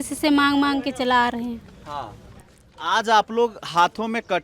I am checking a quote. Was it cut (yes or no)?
no